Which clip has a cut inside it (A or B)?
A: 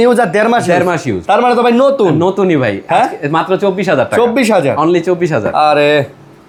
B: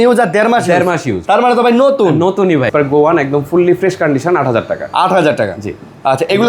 B